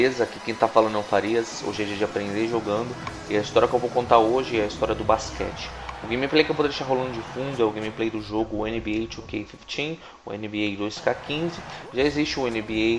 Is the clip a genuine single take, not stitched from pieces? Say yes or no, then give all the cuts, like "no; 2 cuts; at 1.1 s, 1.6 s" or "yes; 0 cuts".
yes; 0 cuts